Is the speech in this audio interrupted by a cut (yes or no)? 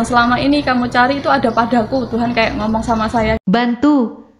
yes